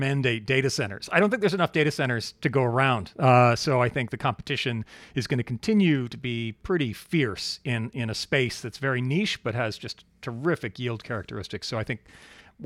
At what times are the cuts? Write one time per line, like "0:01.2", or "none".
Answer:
none